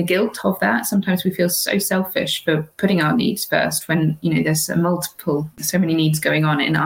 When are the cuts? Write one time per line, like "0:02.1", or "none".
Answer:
0:05.6